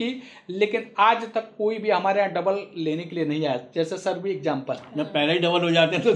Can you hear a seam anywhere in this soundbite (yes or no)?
no